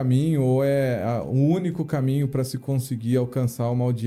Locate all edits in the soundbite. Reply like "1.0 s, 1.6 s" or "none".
none